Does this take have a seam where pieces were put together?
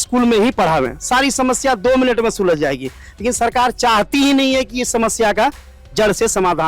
no; 0 cuts

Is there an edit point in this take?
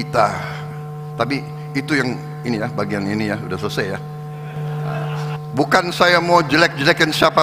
yes; 1 cut; at 5.3 s

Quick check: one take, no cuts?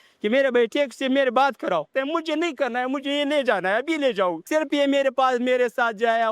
no; 2 cuts; at 1.9 s, 4.5 s

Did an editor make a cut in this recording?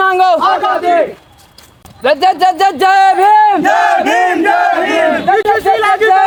no; 0 cuts

